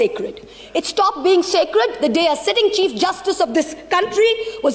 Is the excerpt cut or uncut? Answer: uncut